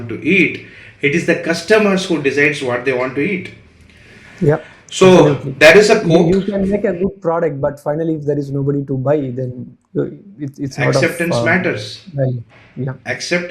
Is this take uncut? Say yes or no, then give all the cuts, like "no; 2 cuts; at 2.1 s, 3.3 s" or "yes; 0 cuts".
yes; 0 cuts